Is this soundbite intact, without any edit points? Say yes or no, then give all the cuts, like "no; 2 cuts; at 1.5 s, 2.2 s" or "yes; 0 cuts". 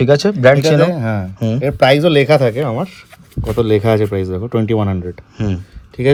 yes; 0 cuts